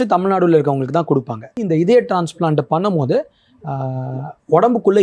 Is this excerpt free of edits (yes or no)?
no